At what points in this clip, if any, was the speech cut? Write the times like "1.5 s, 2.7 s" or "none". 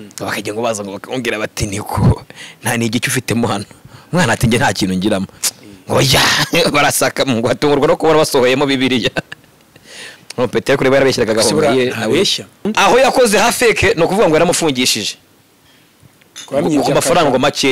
12.7 s